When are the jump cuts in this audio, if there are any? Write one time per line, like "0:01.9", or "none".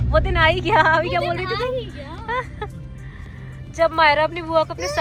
none